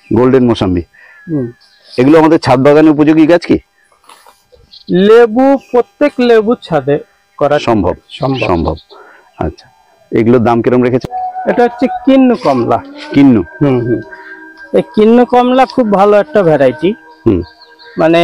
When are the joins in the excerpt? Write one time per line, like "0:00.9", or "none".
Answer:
0:11.0